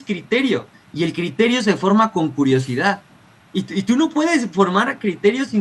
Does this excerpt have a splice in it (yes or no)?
no